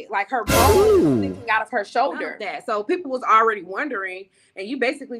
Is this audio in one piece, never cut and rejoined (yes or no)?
no